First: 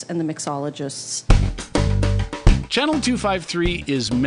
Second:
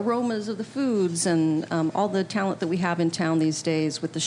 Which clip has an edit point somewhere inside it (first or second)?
first